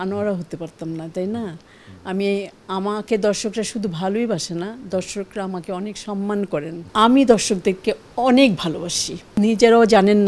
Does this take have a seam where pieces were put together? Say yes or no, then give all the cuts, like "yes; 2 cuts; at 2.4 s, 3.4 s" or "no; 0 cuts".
yes; 2 cuts; at 6.8 s, 9.3 s